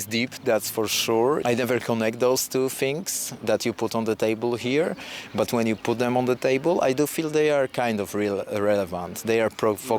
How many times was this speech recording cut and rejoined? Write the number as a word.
one